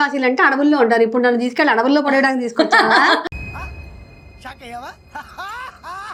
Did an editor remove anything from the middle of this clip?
no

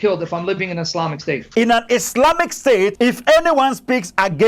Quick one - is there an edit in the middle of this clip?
yes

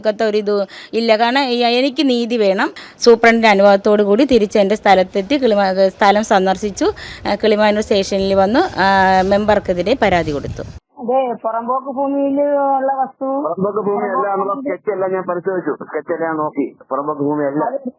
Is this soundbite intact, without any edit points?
no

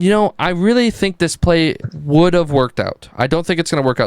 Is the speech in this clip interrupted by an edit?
yes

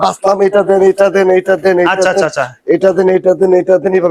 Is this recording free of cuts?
yes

